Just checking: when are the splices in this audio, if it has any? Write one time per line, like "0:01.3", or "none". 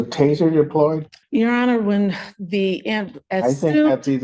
0:01.1

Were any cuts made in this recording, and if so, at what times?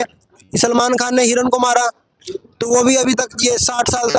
none

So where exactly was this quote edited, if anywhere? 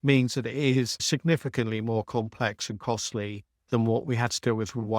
0:01.0

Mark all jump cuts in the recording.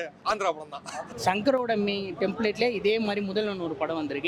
0:01.0

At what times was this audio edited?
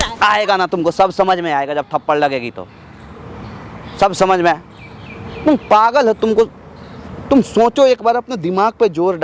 none

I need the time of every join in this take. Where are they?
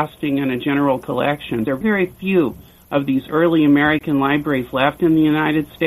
0:01.7

